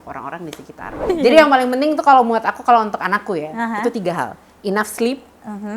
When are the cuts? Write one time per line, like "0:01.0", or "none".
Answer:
0:00.9